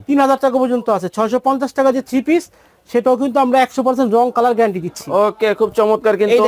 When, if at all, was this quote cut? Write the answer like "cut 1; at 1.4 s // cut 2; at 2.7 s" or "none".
none